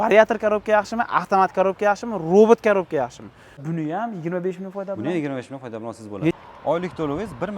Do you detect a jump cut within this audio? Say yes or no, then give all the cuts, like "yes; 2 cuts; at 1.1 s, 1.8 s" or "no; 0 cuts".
yes; 2 cuts; at 3.6 s, 6.4 s